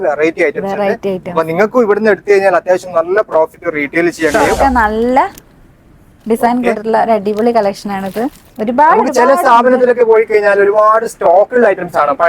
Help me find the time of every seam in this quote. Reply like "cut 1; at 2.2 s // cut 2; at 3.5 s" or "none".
cut 1; at 4.3 s